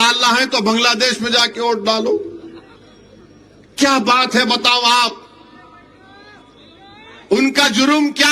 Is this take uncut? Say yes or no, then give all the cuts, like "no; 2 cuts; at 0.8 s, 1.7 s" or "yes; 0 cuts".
yes; 0 cuts